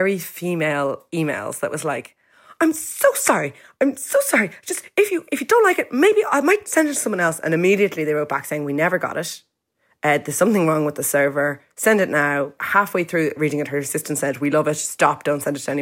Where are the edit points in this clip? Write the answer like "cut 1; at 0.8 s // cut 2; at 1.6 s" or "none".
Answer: cut 1; at 12.6 s // cut 2; at 13.4 s